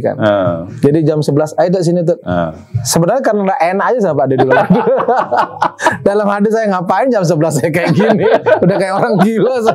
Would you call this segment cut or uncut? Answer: uncut